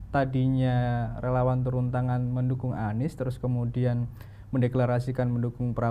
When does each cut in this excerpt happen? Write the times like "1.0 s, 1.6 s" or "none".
none